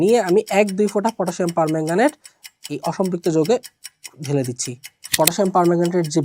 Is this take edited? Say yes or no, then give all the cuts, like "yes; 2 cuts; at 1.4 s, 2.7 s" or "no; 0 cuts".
yes; 1 cut; at 5.1 s